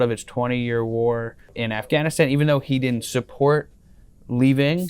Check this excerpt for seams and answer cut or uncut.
cut